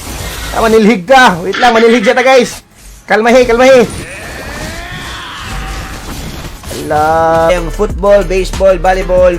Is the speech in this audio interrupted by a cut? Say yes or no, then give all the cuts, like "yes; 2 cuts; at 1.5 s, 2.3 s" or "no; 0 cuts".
yes; 1 cut; at 7.5 s